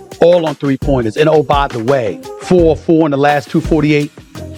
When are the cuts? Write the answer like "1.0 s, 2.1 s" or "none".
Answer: none